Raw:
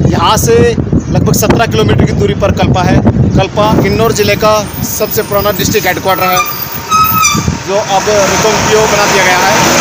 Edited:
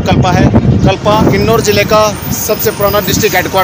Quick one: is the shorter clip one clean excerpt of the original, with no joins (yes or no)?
yes